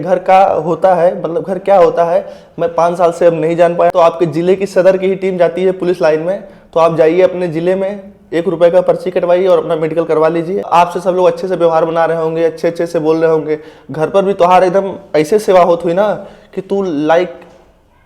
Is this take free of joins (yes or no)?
no